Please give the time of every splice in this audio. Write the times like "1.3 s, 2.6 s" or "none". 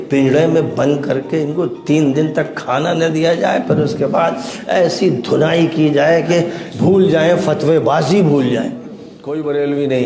9.1 s